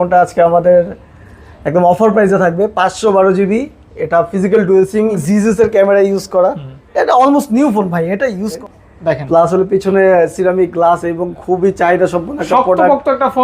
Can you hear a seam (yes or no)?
yes